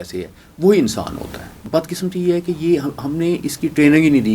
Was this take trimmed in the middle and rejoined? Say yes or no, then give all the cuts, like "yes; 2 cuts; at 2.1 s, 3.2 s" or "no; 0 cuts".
yes; 1 cut; at 1.7 s